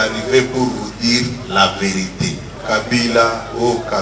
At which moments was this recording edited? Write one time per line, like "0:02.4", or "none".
0:02.5